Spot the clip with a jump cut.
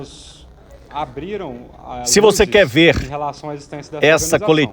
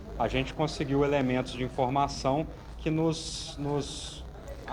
first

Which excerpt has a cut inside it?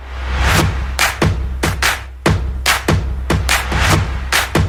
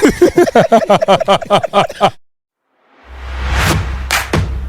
second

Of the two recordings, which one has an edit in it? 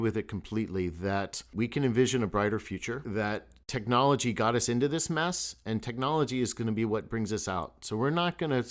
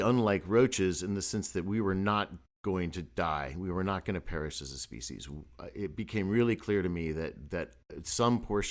first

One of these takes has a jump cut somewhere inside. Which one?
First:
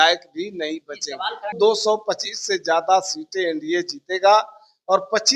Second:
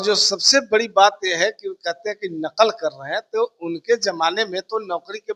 first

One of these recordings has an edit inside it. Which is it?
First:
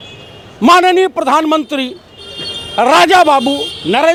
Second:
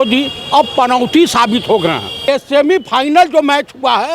second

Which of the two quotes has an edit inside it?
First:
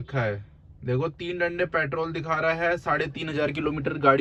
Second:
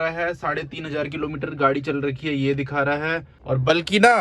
second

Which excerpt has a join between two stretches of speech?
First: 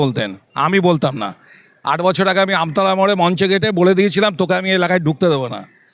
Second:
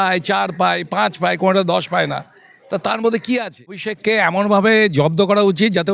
second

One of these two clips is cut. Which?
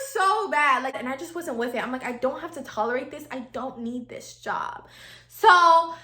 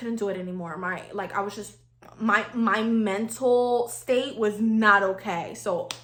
first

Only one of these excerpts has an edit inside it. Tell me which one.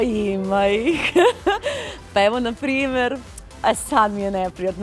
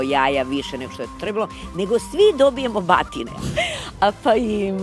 second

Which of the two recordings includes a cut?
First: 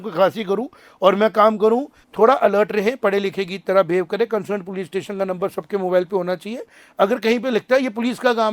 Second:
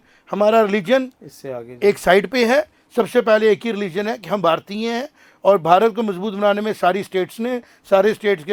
first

